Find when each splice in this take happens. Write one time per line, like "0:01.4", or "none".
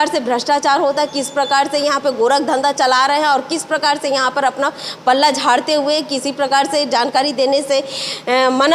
none